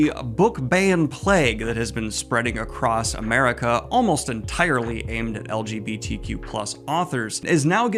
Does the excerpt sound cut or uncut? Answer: uncut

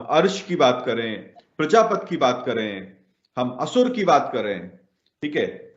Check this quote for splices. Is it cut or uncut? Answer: uncut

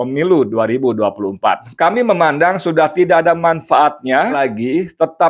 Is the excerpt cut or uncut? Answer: cut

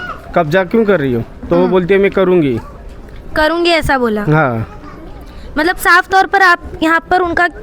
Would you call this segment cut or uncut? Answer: uncut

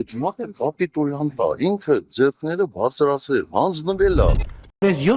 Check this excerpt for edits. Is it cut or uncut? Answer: uncut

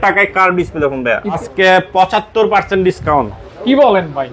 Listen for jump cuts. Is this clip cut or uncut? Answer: cut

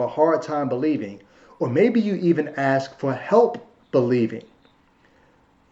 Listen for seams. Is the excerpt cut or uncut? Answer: uncut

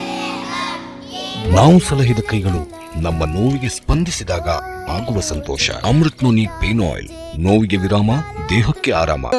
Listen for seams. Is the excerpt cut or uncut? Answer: uncut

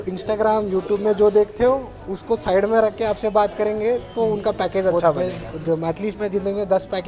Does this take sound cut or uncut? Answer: cut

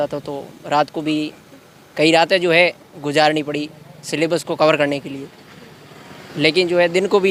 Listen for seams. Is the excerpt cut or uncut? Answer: uncut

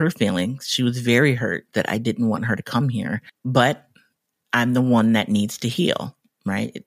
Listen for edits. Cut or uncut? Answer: cut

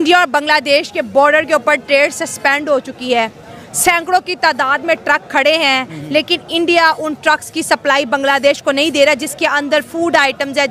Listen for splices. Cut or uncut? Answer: uncut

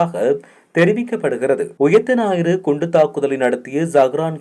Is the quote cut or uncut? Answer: cut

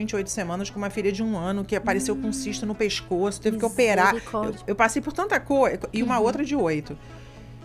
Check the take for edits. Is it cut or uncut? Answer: uncut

